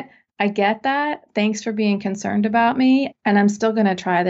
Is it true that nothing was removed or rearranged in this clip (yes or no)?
no